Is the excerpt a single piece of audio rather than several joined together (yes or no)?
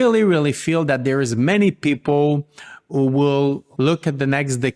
no